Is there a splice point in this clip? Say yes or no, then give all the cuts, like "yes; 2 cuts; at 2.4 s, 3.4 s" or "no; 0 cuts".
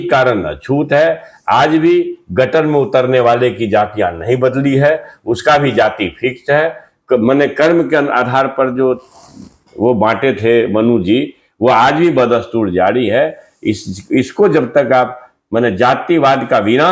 no; 0 cuts